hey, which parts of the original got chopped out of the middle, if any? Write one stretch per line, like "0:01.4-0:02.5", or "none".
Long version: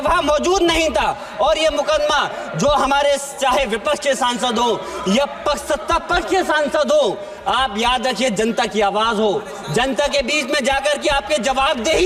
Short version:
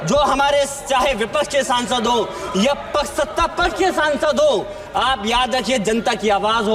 none